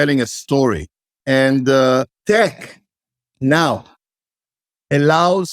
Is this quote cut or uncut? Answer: cut